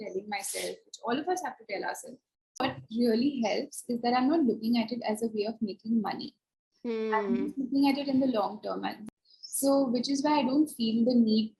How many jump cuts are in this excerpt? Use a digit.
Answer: 2